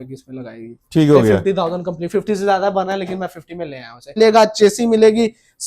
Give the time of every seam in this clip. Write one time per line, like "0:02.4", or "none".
0:04.2